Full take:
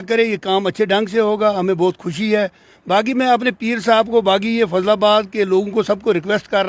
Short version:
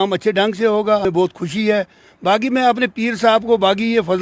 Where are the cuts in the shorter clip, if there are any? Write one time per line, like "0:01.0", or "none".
0:01.0